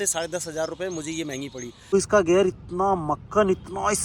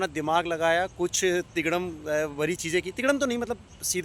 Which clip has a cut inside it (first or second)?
first